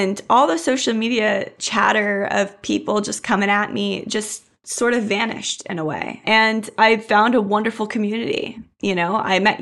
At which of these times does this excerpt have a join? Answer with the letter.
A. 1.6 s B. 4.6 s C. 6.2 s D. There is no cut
C